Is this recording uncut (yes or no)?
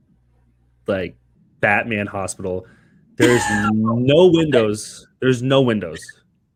yes